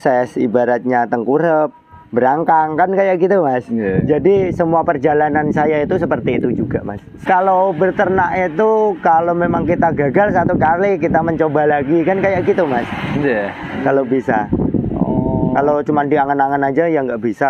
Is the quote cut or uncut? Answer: cut